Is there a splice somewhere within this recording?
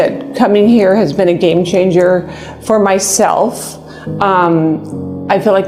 no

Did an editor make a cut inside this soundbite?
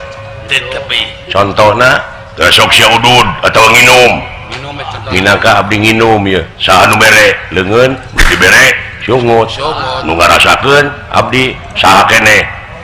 no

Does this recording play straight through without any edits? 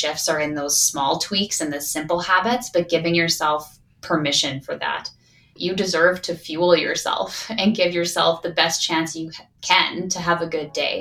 yes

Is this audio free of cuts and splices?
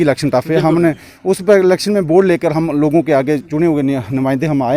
yes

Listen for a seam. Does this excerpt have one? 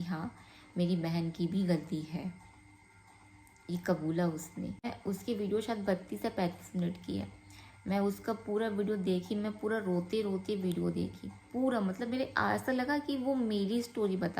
yes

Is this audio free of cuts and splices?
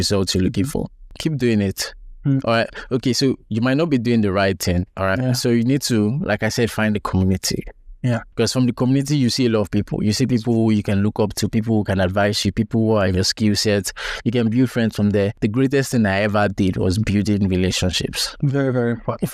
no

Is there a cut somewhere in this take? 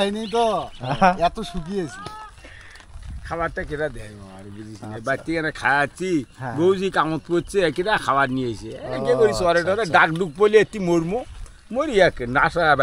no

